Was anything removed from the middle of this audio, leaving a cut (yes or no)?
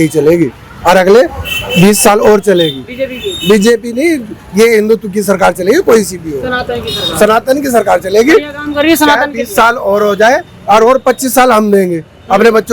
no